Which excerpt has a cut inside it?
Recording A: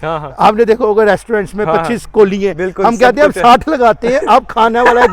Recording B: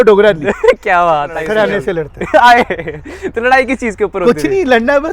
B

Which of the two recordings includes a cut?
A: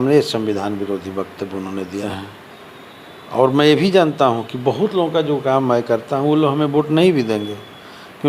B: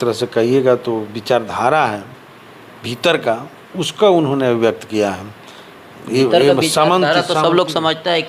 A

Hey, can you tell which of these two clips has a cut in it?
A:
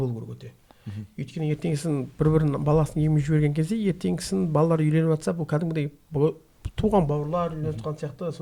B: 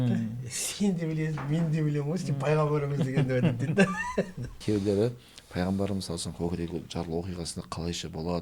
B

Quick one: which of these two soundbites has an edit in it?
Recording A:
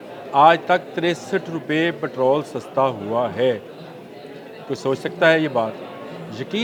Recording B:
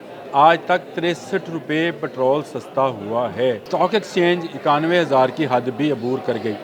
B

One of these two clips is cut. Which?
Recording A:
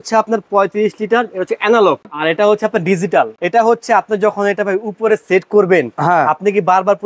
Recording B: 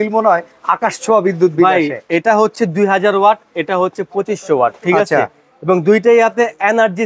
A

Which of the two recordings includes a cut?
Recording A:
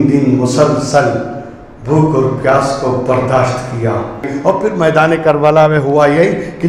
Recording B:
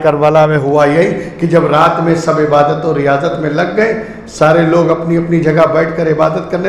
A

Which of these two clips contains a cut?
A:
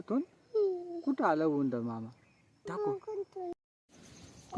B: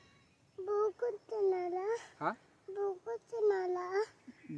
A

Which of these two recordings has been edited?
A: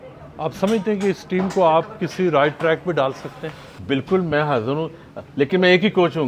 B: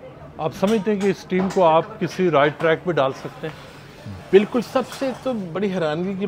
A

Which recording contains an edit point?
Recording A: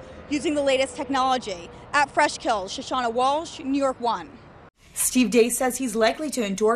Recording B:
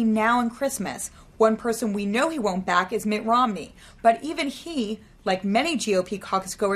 A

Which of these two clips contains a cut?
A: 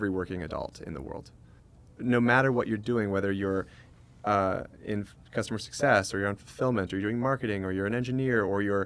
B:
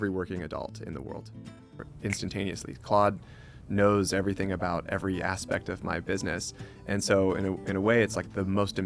B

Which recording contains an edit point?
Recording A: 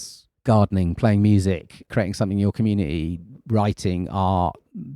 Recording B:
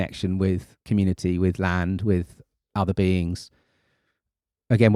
A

